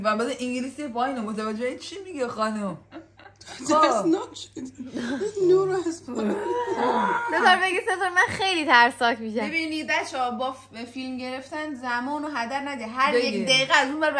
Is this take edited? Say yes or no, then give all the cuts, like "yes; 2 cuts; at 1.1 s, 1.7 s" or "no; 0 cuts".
no; 0 cuts